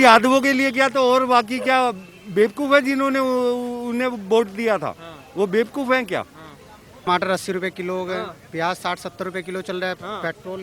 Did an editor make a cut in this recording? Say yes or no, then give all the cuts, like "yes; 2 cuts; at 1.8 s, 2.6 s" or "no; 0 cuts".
yes; 1 cut; at 7.1 s